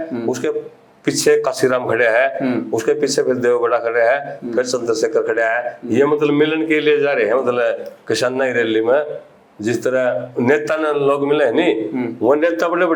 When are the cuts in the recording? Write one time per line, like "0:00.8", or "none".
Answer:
none